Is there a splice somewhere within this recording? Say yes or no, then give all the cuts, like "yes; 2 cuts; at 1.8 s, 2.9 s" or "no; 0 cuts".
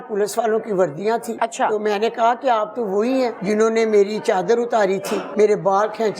yes; 3 cuts; at 1.3 s, 3.4 s, 5.3 s